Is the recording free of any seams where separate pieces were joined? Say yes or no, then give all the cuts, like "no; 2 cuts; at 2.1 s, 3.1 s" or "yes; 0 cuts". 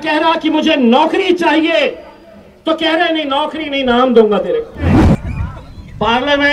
no; 1 cut; at 4.9 s